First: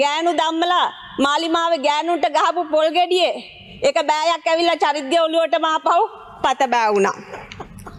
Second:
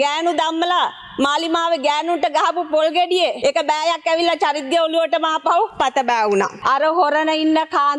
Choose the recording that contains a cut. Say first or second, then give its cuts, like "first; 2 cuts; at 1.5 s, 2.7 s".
second; 3 cuts; at 3.4 s, 5.7 s, 6.6 s